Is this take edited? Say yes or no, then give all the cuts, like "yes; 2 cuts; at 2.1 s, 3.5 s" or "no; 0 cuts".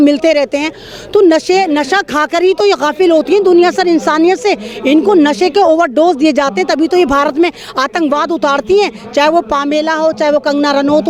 no; 0 cuts